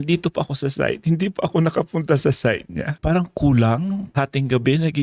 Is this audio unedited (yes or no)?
no